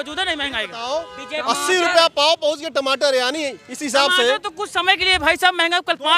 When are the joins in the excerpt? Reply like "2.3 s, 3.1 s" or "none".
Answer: none